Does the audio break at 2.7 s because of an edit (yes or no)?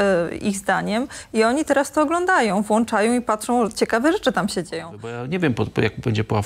no